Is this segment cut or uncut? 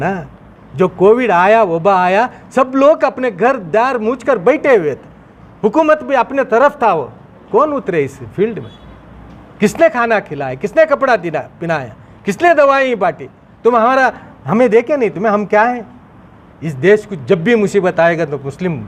uncut